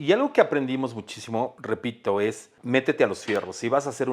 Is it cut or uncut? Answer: cut